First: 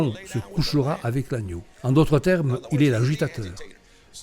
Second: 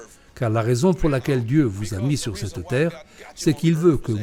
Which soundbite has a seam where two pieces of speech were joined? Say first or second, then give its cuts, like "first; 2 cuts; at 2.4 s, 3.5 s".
first; 1 cut; at 1.6 s